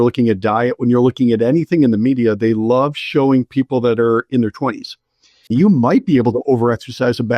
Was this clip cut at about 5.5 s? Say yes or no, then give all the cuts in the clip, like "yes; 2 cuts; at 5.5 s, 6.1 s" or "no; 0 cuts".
yes; 1 cut; at 5.5 s